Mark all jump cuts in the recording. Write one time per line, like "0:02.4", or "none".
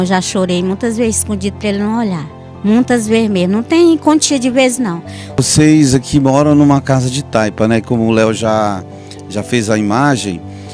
0:05.2